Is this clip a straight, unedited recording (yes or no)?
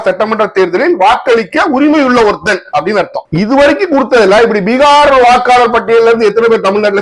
no